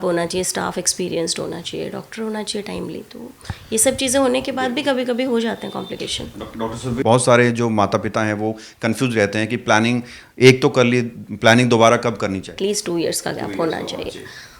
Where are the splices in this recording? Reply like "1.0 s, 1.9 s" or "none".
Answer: 7.0 s, 12.5 s